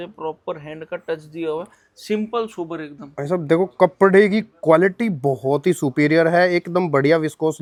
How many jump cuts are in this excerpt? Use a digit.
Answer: 0